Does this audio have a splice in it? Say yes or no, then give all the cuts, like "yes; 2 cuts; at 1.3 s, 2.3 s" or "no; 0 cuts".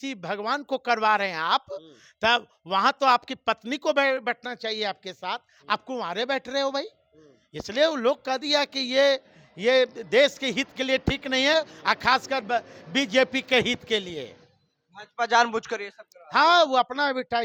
no; 0 cuts